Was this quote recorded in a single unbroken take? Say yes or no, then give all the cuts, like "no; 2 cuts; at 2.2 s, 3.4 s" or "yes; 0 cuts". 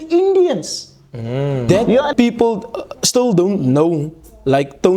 no; 1 cut; at 2.1 s